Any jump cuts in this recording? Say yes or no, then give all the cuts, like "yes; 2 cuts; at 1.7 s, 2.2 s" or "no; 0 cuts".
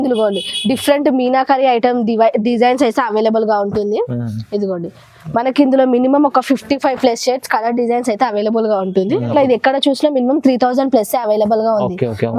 yes; 1 cut; at 9.3 s